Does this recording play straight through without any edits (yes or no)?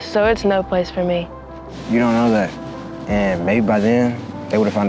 yes